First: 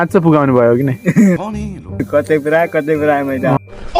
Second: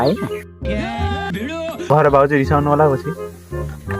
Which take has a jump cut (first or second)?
second